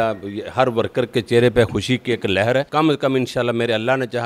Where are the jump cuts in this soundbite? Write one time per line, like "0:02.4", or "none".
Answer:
0:02.7